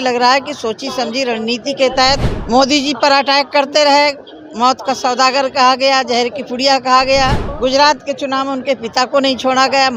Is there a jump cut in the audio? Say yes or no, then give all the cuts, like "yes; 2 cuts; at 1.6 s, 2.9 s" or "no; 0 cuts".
yes; 2 cuts; at 2.3 s, 7.5 s